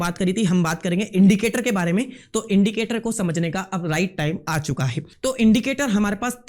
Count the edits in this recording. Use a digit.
1